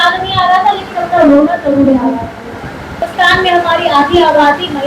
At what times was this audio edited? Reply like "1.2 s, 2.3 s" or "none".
3.0 s